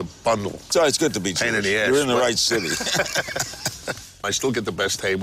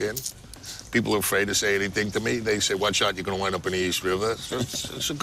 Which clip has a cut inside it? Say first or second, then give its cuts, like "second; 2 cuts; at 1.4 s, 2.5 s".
first; 1 cut; at 4.2 s